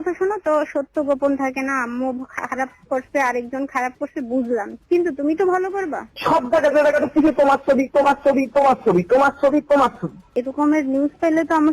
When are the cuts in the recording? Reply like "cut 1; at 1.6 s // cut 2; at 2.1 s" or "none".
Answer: cut 1; at 6.2 s // cut 2; at 10.3 s